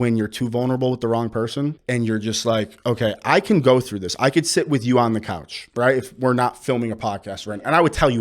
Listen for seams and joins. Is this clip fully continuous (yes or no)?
no